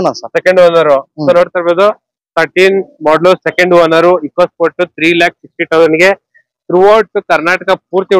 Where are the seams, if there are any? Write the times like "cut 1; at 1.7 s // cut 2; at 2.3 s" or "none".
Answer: none